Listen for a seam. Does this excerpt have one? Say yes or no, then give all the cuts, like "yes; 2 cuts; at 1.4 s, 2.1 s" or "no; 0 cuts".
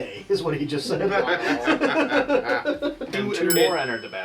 yes; 1 cut; at 3.1 s